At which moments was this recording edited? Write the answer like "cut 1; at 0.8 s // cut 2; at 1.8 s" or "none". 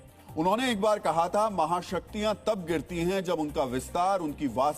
none